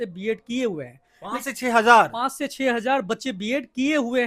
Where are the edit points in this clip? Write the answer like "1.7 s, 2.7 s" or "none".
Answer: none